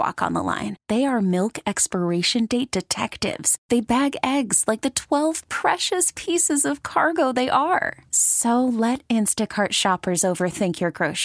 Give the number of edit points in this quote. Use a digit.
0